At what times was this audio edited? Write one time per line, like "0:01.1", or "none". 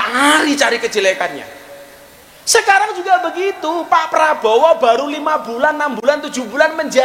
none

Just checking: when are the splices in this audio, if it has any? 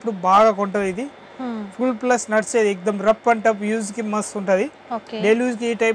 none

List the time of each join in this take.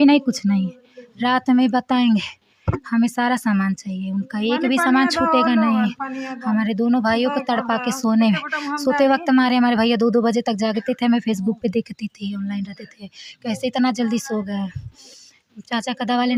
none

